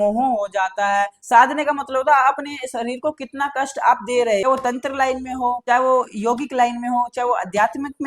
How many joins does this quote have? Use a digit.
2